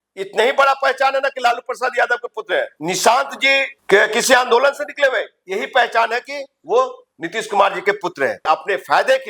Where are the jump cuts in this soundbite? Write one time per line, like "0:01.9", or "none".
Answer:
0:02.7
0:03.8
0:08.4